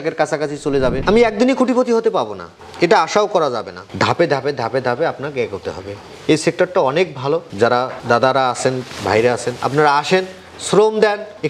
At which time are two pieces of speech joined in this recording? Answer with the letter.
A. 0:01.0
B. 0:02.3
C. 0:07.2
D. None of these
A